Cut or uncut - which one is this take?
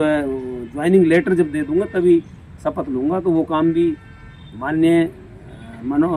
uncut